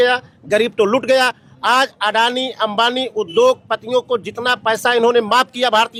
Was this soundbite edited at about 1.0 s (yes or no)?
no